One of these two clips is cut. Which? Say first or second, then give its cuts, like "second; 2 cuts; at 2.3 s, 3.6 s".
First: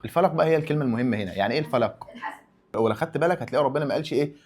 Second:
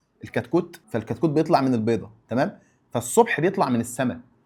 first; 1 cut; at 2.6 s